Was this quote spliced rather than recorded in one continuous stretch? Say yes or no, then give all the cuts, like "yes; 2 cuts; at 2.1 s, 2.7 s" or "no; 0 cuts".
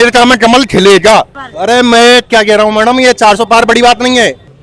yes; 1 cut; at 1.3 s